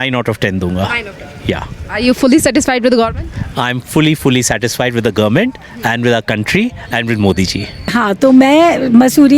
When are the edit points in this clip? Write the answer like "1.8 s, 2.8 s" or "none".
7.9 s